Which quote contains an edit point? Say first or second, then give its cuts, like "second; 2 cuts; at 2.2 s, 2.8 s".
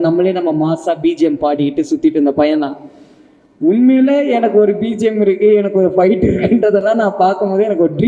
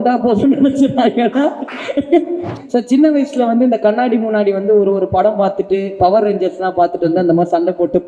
second; 1 cut; at 2.5 s